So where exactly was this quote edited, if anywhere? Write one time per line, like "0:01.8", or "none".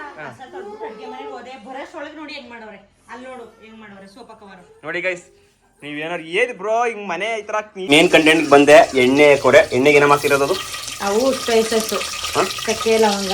0:07.8